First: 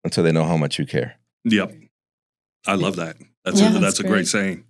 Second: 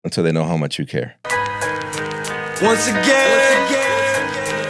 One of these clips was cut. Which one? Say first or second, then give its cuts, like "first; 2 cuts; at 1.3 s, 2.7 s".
second; 1 cut; at 1.4 s